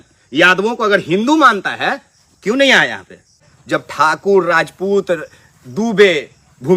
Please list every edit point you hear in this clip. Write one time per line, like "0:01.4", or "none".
0:03.5